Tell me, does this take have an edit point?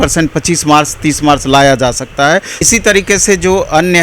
yes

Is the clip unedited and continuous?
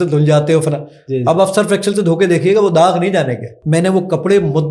no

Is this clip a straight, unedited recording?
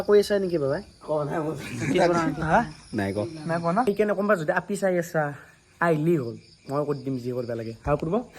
no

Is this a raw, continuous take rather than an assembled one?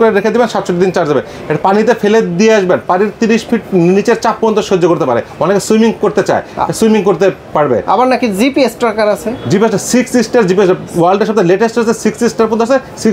yes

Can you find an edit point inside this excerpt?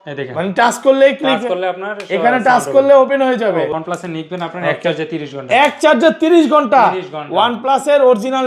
yes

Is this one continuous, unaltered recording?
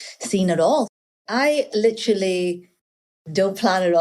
no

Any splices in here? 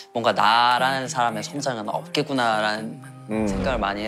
no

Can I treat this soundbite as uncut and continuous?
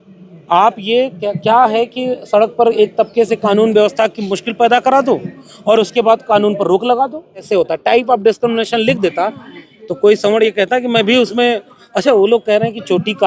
no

